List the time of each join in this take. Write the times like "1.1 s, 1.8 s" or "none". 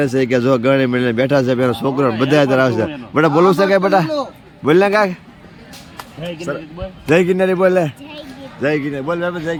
none